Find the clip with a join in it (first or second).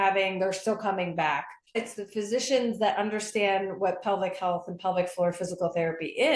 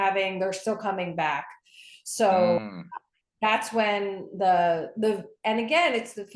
first